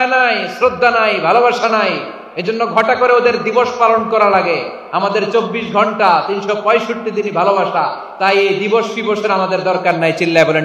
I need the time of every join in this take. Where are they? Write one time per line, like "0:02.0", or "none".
none